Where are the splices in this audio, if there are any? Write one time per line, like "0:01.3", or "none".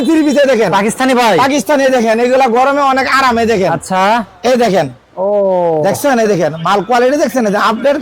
none